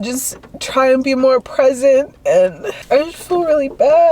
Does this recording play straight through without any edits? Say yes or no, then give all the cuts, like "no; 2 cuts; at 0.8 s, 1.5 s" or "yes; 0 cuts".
no; 1 cut; at 2.7 s